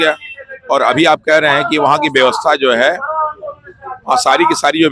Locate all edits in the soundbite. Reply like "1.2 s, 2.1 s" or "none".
none